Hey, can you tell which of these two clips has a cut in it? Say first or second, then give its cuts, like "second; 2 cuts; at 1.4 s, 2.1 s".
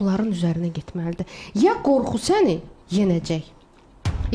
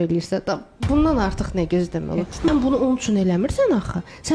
second; 1 cut; at 2.5 s